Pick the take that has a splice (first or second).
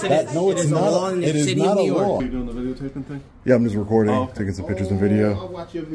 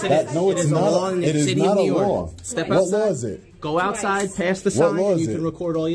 first